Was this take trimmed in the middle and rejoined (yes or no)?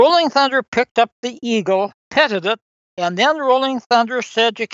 yes